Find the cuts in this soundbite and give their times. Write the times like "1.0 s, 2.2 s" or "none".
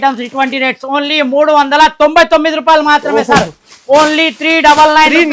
none